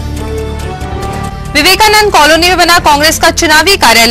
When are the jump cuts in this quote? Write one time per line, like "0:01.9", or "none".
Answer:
0:00.9